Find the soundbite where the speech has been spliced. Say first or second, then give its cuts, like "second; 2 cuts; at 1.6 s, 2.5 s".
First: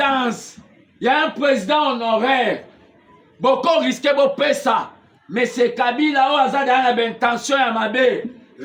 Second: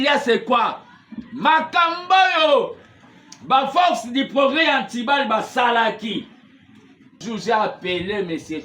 second; 1 cut; at 7.2 s